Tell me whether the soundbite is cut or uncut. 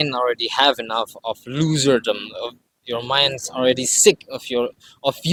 uncut